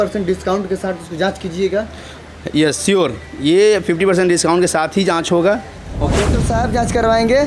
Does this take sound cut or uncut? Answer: cut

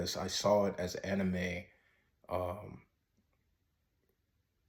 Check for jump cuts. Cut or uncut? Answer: uncut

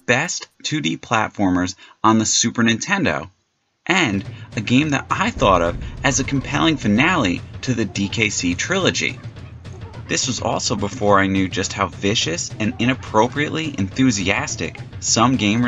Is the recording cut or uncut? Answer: cut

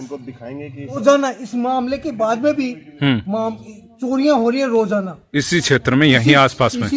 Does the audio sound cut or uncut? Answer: cut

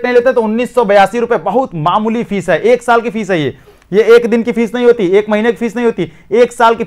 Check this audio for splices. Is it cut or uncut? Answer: uncut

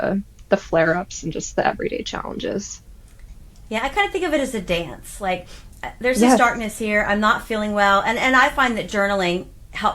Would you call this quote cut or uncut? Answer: uncut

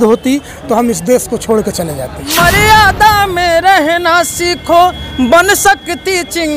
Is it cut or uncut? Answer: cut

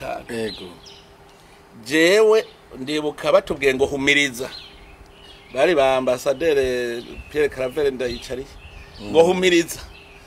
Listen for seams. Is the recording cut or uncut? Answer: uncut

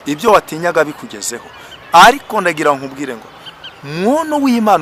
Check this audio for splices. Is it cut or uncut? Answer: uncut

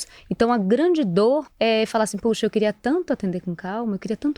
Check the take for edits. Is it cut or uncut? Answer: cut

